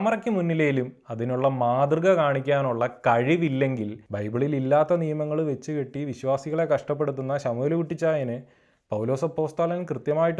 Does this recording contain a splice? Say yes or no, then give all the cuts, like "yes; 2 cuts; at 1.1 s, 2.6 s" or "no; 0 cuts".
yes; 1 cut; at 4.1 s